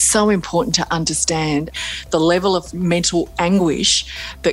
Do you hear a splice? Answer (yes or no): yes